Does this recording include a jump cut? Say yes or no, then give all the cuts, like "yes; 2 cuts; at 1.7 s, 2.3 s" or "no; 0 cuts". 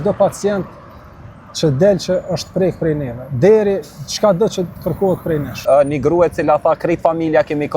yes; 1 cut; at 5.6 s